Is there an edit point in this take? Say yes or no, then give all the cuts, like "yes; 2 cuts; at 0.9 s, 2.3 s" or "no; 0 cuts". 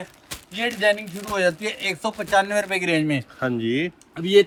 no; 0 cuts